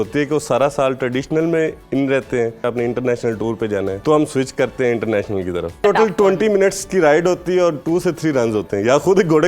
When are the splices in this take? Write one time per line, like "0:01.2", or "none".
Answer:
0:02.6
0:04.0
0:05.8